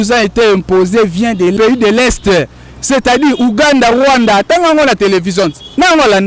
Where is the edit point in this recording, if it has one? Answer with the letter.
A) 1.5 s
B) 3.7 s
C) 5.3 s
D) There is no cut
A